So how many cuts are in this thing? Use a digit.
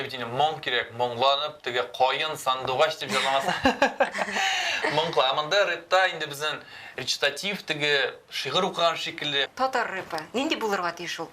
1